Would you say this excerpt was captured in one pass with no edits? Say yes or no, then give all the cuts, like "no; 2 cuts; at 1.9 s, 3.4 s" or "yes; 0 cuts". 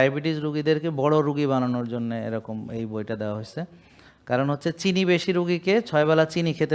yes; 0 cuts